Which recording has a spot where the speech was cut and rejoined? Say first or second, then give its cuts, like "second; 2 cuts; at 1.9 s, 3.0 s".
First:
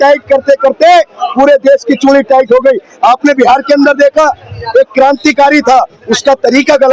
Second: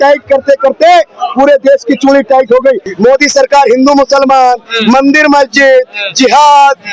second; 1 cut; at 2.9 s